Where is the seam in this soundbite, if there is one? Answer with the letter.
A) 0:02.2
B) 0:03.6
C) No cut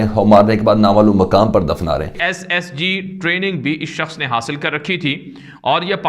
A